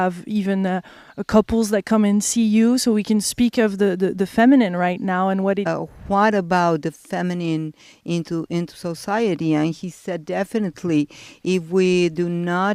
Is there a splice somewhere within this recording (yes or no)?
no